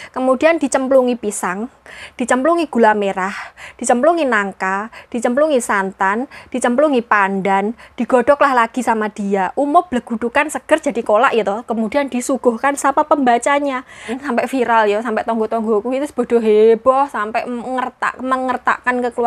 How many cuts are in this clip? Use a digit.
1